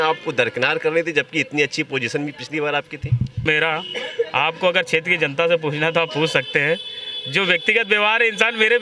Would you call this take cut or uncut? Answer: cut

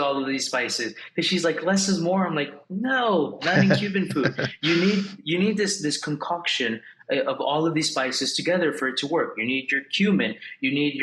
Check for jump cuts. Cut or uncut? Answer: uncut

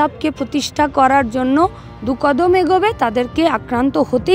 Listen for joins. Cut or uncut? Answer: uncut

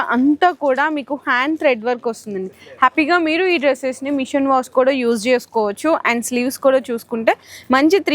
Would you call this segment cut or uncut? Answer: uncut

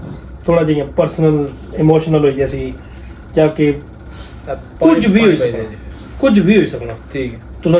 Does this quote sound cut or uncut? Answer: uncut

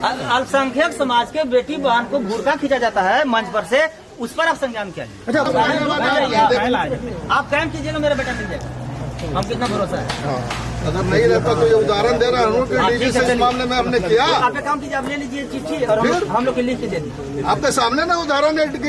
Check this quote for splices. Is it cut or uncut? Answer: cut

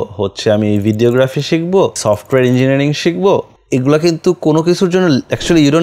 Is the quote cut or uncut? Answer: cut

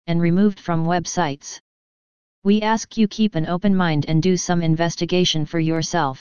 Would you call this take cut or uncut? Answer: cut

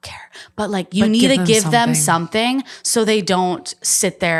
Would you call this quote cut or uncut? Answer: uncut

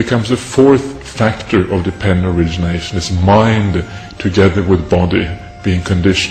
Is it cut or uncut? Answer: uncut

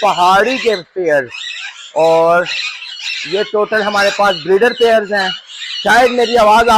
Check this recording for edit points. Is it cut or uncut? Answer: uncut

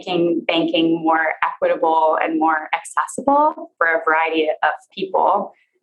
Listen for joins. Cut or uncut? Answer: cut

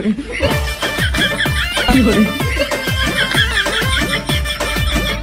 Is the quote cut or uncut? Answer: uncut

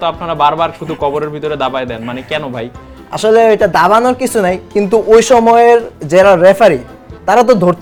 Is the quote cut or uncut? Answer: uncut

